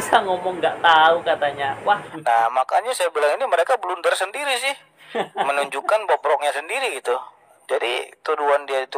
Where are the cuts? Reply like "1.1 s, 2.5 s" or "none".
2.1 s